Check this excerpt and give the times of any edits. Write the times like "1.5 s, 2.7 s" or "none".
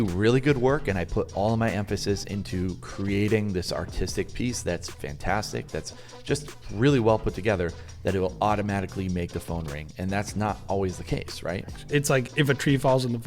11.8 s